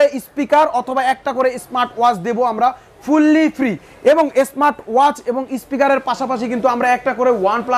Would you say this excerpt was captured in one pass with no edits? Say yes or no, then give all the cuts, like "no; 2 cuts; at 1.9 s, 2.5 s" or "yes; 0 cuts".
yes; 0 cuts